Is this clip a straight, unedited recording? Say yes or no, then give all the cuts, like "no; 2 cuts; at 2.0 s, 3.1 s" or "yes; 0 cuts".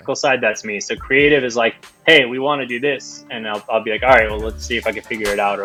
yes; 0 cuts